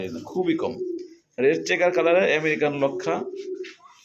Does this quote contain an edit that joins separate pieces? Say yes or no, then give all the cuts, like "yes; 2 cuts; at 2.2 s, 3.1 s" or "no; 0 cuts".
no; 0 cuts